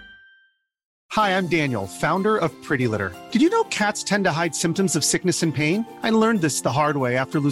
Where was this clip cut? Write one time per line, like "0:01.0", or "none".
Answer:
0:00.9